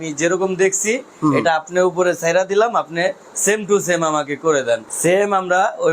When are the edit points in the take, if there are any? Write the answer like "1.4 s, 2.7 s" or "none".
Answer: 4.9 s